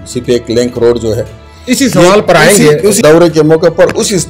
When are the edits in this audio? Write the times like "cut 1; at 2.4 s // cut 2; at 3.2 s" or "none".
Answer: cut 1; at 3.0 s